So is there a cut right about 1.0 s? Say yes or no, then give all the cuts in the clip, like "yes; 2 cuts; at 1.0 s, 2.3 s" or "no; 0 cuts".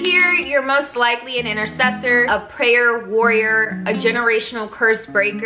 no; 1 cut; at 2.3 s